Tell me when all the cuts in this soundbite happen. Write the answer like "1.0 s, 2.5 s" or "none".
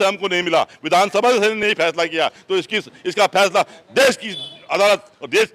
none

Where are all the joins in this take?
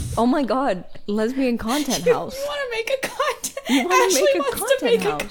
0.9 s

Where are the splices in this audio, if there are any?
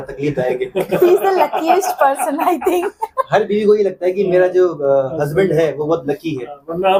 none

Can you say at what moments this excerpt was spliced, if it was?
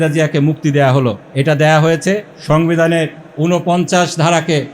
1.2 s, 2.3 s, 3.2 s

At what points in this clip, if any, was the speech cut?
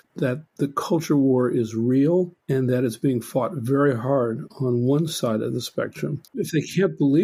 none

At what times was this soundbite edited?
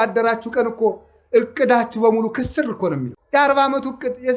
3.2 s

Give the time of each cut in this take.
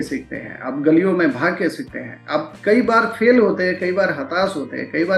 none

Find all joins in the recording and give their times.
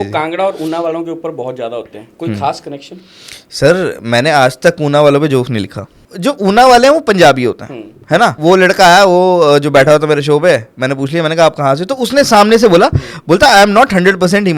5.9 s, 8.4 s

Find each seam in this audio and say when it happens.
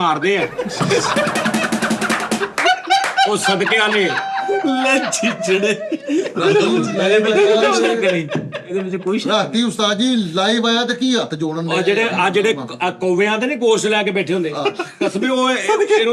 none

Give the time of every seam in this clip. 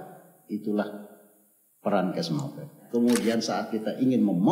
2.8 s

